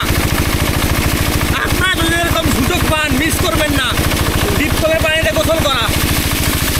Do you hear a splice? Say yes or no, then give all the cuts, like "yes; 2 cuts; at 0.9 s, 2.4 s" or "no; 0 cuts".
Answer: no; 0 cuts